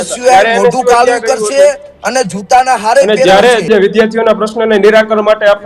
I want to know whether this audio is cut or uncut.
cut